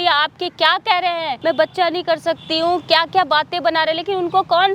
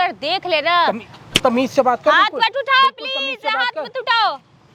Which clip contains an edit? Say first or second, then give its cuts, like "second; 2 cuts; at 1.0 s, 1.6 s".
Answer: first; 1 cut; at 1.3 s